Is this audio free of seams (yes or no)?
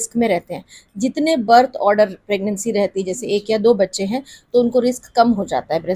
yes